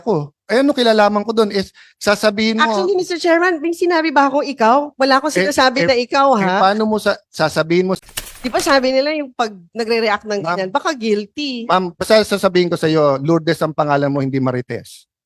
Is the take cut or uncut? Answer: cut